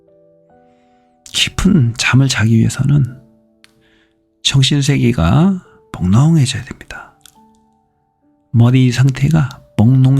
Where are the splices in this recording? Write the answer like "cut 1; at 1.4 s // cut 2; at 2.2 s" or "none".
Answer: cut 1; at 1.2 s